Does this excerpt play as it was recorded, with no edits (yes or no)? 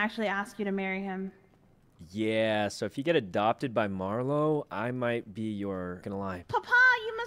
no